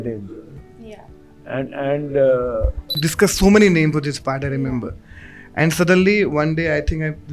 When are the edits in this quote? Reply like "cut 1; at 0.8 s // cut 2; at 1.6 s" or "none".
cut 1; at 3.1 s

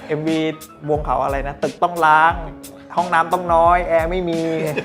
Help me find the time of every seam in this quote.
none

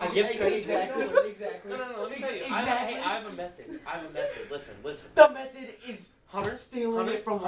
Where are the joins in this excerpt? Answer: none

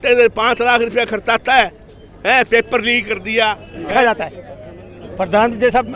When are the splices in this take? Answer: cut 1; at 3.9 s

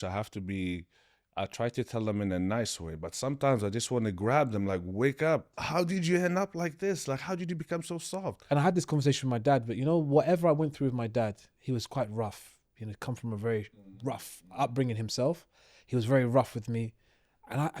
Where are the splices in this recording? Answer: cut 1; at 5.6 s // cut 2; at 8.4 s

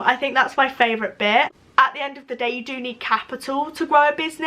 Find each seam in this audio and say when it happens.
cut 1; at 1.5 s

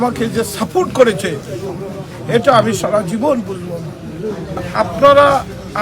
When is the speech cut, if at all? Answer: cut 1; at 4.7 s

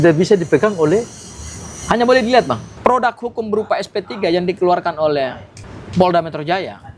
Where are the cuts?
cut 1; at 2.7 s

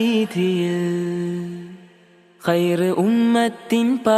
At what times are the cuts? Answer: cut 1; at 0.9 s

